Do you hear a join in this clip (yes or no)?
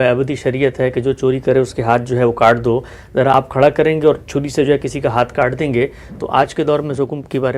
yes